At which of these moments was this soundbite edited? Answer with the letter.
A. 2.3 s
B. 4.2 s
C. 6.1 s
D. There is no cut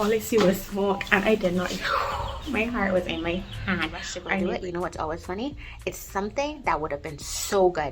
B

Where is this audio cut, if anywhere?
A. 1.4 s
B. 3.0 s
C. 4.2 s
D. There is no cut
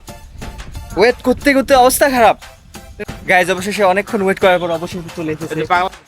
B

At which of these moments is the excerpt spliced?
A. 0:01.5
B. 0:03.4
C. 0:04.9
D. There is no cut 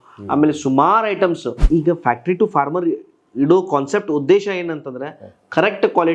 A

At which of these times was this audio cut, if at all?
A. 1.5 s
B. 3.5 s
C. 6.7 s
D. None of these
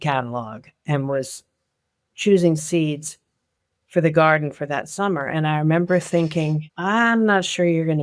C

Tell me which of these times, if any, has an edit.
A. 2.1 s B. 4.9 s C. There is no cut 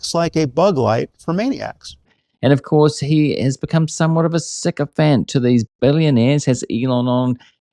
A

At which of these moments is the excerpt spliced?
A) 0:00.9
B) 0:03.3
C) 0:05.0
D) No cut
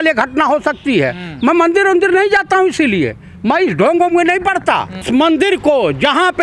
C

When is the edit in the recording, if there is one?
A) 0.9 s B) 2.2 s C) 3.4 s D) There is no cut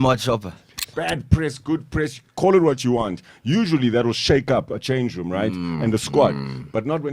A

